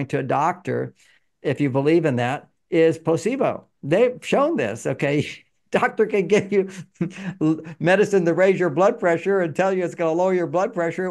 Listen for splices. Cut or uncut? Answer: uncut